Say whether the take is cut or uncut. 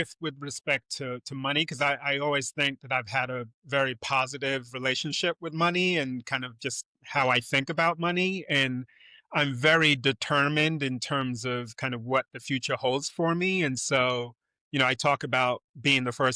uncut